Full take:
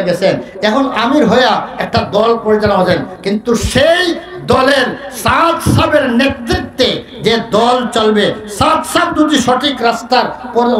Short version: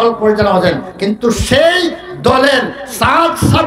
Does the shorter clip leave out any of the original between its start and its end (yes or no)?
no